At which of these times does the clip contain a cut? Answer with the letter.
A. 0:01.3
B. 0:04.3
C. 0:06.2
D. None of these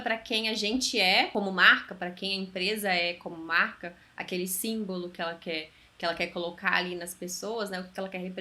A